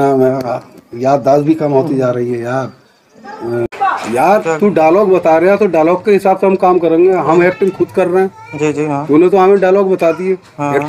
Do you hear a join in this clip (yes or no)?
yes